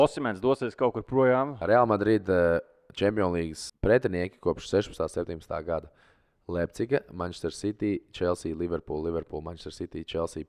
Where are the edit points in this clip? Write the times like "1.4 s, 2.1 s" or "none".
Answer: 1.6 s, 3.6 s